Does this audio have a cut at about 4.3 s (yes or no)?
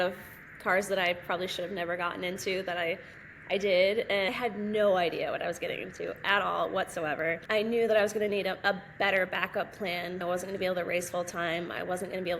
yes